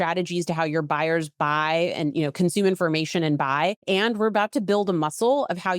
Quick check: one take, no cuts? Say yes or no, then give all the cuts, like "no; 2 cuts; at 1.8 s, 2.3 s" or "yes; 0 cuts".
no; 1 cut; at 3.8 s